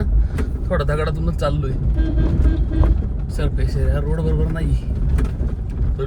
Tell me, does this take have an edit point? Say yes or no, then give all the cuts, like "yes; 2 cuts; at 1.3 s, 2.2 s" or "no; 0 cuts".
no; 0 cuts